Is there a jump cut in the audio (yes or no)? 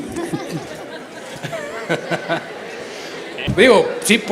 yes